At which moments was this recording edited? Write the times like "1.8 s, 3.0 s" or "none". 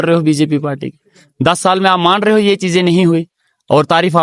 none